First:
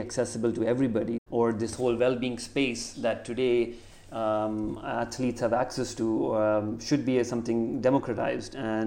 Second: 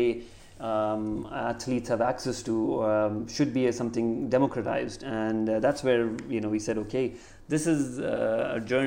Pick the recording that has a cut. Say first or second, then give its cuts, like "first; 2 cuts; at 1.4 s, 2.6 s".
first; 1 cut; at 1.2 s